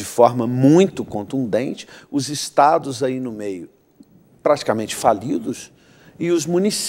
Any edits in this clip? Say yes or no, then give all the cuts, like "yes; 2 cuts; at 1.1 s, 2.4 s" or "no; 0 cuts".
no; 0 cuts